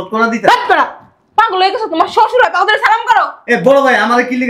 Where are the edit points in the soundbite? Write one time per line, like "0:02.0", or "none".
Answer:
none